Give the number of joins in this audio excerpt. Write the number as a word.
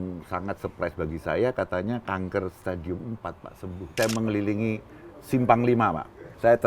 one